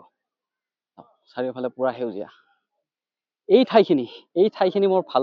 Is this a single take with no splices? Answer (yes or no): yes